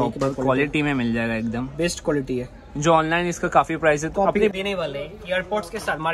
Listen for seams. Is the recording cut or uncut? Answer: cut